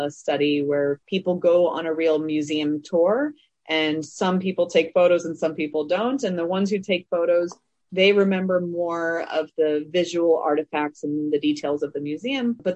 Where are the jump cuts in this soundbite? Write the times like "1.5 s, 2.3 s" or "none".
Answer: 1.1 s